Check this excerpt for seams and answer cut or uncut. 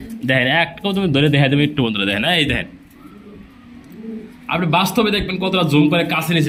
uncut